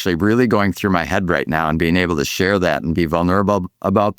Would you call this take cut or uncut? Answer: uncut